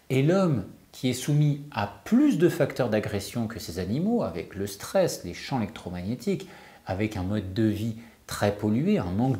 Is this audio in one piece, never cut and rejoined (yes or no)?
yes